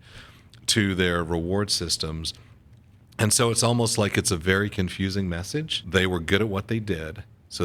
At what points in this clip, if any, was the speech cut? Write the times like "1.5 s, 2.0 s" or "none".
5.8 s